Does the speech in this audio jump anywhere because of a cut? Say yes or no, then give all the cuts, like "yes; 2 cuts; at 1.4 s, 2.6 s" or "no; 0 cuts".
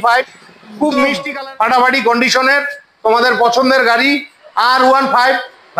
yes; 1 cut; at 1.2 s